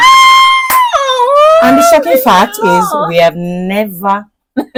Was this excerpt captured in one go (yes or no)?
yes